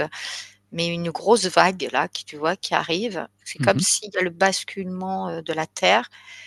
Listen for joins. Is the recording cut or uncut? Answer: uncut